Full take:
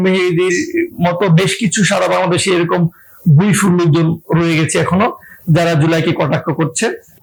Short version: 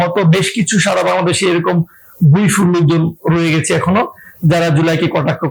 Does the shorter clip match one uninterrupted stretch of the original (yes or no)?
yes